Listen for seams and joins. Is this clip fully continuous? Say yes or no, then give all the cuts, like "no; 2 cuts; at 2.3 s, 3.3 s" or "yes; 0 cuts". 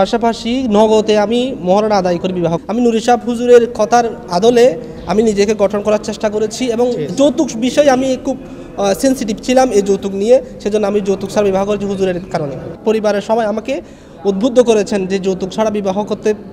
no; 2 cuts; at 2.6 s, 12.8 s